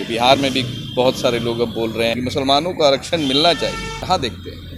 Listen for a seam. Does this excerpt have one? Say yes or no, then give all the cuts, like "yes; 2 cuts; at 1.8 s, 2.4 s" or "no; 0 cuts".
no; 0 cuts